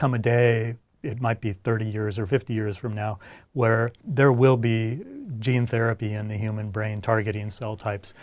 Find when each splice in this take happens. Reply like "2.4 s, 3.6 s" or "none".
4.0 s